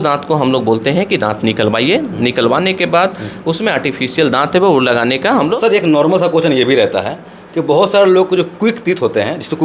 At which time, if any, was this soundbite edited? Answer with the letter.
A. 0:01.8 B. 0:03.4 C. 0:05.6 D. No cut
C